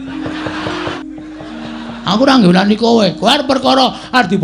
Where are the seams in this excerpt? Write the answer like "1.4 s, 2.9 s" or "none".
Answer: 1.0 s